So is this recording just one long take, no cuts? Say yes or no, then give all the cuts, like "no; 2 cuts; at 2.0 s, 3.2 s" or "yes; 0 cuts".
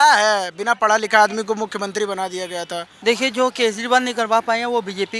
no; 1 cut; at 2.9 s